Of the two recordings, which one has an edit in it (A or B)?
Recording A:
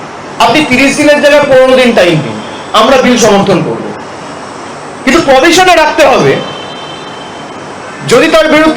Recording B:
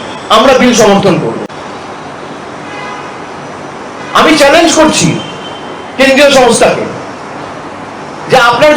B